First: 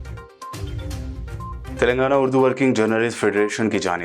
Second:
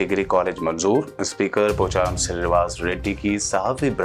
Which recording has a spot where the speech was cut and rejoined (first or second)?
first